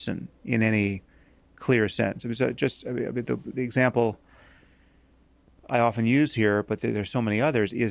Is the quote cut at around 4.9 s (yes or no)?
no